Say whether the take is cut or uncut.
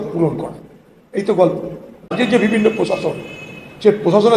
cut